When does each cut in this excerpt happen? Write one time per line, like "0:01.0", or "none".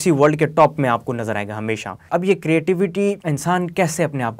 0:02.0
0:03.2